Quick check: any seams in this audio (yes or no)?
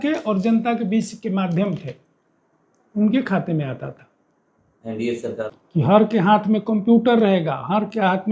yes